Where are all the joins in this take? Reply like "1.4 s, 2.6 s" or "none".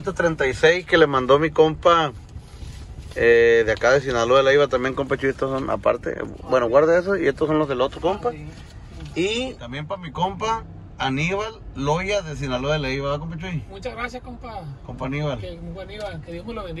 9.7 s